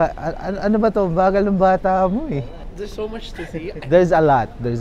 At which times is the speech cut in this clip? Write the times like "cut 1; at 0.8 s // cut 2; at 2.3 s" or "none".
cut 1; at 2.6 s